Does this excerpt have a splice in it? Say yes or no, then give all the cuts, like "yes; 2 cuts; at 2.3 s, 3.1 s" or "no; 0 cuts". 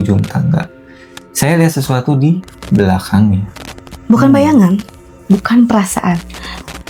no; 0 cuts